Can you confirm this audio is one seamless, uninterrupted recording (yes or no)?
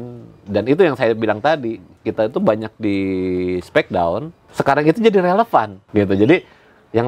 no